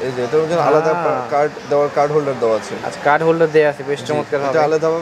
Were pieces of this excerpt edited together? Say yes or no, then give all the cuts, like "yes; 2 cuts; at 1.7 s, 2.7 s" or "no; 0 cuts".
no; 0 cuts